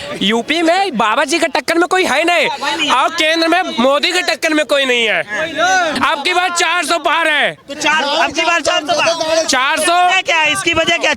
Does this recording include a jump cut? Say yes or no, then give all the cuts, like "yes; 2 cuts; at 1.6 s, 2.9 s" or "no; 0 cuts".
yes; 1 cut; at 6.0 s